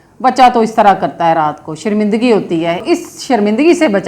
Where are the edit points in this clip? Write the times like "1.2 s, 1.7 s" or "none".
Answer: 2.8 s